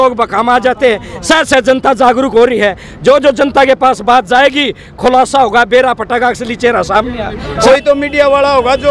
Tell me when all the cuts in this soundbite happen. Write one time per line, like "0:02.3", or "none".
0:07.5